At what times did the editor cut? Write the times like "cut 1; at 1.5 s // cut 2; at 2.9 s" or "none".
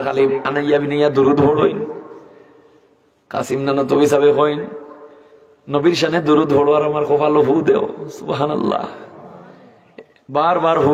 none